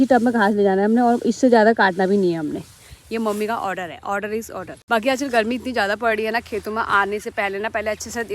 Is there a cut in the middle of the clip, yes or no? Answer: yes